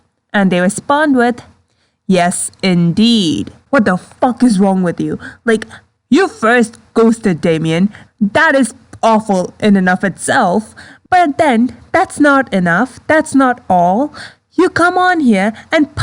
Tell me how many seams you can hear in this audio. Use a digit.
1